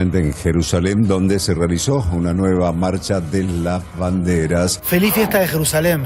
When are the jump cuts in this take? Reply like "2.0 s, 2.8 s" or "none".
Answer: 4.8 s